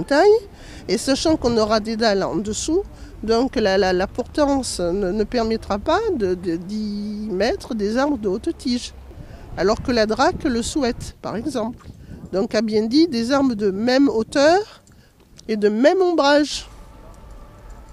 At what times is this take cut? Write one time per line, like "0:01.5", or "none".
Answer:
0:08.4